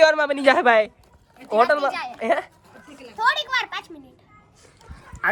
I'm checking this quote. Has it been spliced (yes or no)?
no